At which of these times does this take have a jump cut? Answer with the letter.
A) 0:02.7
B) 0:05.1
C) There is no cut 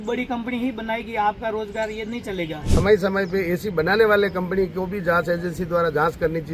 A